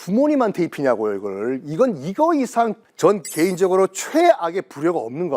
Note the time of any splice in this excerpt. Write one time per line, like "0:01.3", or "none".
0:02.8